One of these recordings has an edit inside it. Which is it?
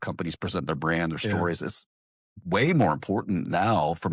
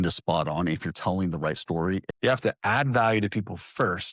second; 1 cut; at 2.0 s

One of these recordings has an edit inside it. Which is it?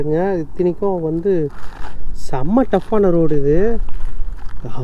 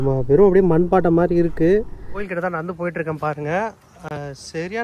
second; 1 cut; at 2.3 s

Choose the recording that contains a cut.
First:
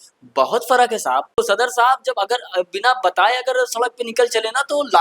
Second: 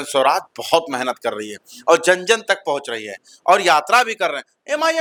first; 1 cut; at 1.4 s

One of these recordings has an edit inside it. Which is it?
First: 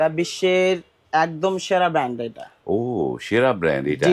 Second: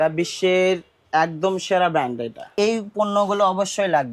second; 1 cut; at 2.5 s

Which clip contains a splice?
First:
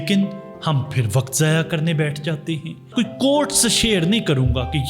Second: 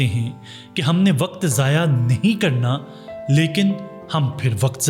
first; 1 cut; at 2.9 s

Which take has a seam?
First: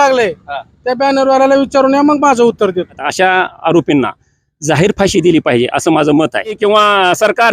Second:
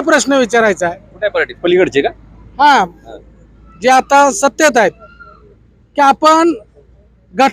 first; 2 cuts; at 3.0 s, 6.6 s

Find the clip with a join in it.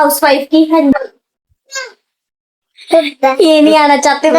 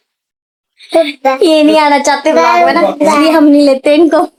first; 1 cut; at 0.9 s

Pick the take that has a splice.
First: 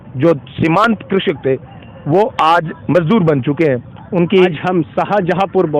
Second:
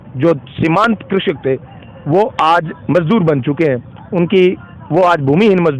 first; 1 cut; at 4.5 s

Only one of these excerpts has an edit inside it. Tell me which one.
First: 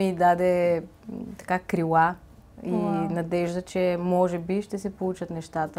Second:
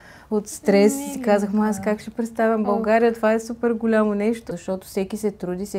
second; 1 cut; at 4.4 s

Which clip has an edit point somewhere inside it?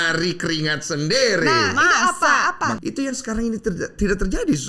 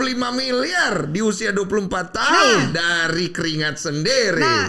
first; 1 cut; at 2.8 s

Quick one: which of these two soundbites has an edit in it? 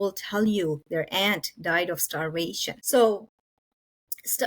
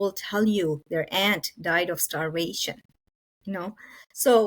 first; 1 cut; at 2.7 s

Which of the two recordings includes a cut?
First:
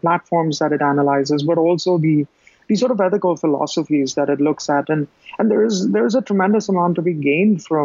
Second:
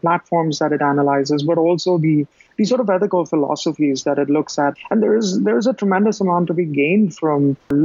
second; 2 cuts; at 2.4 s, 4.7 s

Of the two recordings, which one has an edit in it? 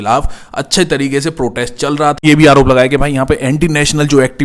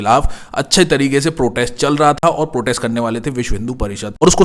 first; 1 cut; at 2.2 s

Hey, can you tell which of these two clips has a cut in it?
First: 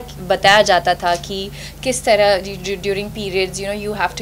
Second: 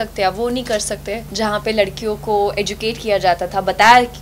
second; 1 cut; at 1.2 s

